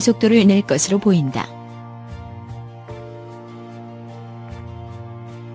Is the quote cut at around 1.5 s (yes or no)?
no